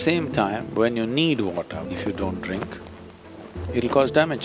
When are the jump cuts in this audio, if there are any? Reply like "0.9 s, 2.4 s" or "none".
1.9 s